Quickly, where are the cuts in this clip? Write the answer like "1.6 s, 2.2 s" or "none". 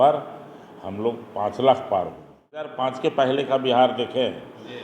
2.7 s